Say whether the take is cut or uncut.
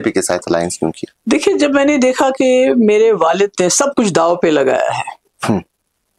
uncut